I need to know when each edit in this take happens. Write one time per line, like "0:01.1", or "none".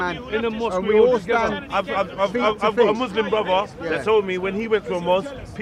none